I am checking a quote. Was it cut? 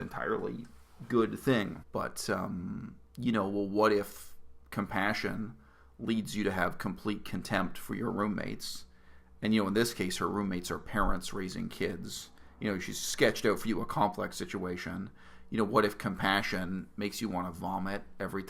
yes; 1 cut; at 1.8 s

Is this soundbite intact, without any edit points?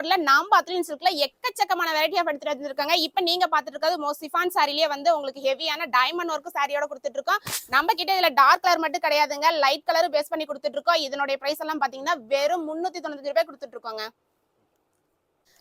yes; 0 cuts

